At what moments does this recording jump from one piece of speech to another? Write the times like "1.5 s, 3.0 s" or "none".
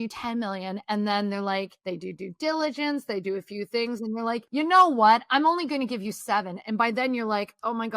1.8 s, 4.4 s